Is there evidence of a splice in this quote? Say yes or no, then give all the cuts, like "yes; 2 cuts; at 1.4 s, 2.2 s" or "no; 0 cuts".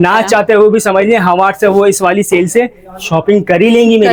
no; 0 cuts